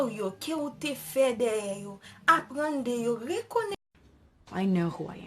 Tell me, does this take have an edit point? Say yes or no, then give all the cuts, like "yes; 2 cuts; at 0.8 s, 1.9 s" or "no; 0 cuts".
yes; 1 cut; at 3.8 s